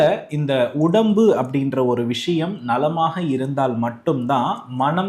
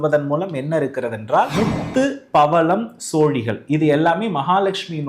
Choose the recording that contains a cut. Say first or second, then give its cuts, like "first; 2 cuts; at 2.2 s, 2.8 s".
second; 1 cut; at 1.5 s